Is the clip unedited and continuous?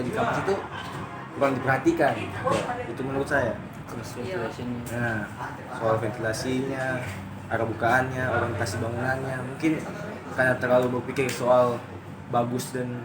yes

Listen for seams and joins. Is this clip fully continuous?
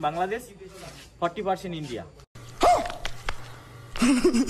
no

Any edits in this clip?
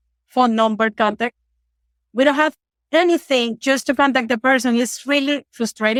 no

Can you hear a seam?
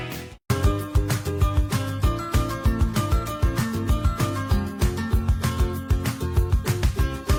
no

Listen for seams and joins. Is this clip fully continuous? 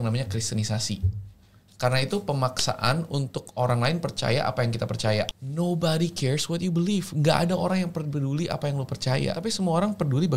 no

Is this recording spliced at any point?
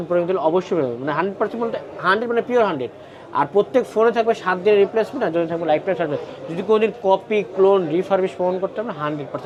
no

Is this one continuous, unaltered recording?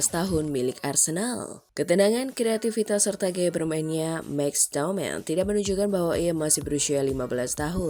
yes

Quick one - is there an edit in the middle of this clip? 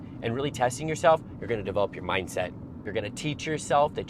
yes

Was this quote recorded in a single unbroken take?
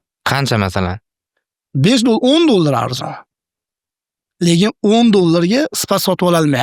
yes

